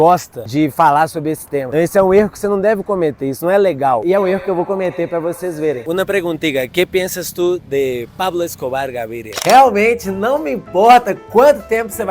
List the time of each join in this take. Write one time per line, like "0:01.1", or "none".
0:04.0
0:05.8
0:09.3